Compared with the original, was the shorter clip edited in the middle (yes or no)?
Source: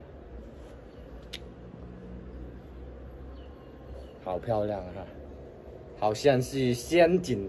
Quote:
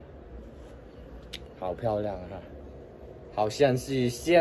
yes